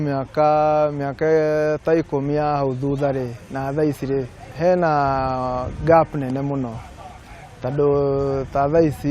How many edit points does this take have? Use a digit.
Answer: 1